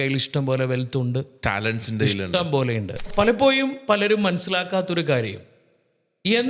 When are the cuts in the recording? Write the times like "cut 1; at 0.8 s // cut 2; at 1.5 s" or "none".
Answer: cut 1; at 3.1 s